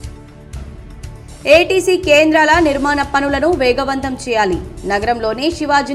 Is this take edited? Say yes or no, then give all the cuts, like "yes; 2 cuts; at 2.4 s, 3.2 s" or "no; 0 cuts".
no; 0 cuts